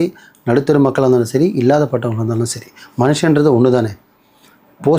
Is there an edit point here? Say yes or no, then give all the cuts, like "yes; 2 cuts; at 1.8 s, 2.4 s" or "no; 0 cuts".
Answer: no; 0 cuts